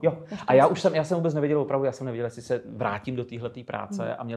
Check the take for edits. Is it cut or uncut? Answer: uncut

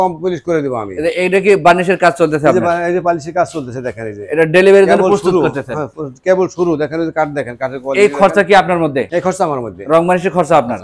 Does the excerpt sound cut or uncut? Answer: uncut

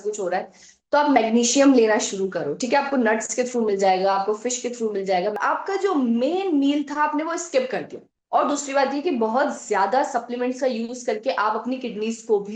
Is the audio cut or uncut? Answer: cut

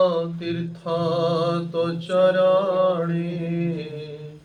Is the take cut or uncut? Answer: uncut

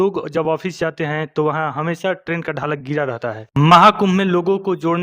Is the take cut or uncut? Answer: cut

